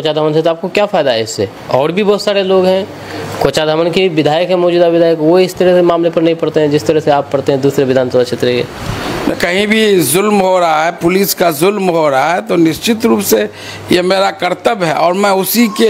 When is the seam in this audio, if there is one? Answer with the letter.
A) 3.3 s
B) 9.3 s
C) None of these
B